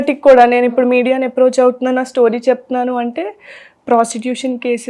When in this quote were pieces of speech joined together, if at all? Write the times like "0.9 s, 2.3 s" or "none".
none